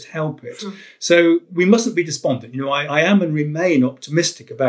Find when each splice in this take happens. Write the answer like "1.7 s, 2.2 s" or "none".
2.9 s